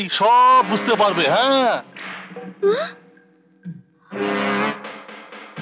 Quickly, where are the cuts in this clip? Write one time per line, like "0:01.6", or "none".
none